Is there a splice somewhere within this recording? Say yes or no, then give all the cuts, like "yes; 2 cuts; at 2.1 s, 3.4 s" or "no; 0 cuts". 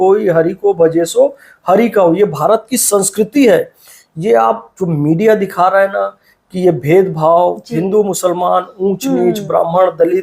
no; 0 cuts